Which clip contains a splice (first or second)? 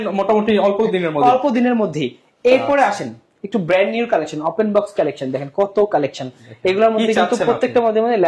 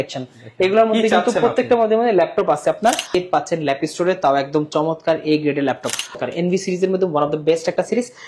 second